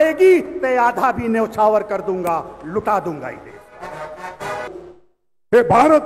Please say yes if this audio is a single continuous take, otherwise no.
no